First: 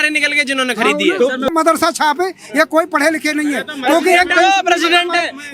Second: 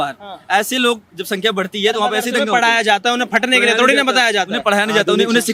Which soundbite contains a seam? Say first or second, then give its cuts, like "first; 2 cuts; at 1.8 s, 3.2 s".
first; 1 cut; at 1.5 s